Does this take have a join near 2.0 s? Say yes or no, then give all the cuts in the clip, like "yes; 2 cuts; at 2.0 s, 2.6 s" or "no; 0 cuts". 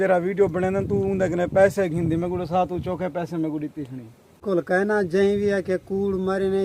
no; 1 cut; at 4.4 s